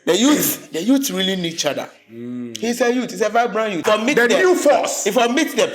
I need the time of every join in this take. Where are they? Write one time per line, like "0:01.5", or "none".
0:03.8